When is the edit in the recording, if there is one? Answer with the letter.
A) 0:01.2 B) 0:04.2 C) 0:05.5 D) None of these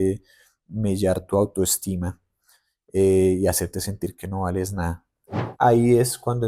C